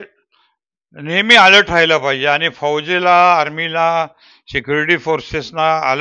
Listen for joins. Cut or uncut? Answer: uncut